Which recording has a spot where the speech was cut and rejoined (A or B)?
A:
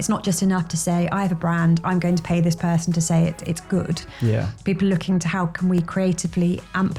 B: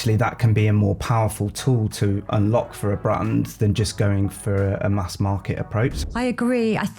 B